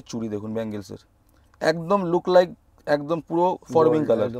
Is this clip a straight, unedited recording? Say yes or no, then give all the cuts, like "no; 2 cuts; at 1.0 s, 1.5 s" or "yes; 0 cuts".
yes; 0 cuts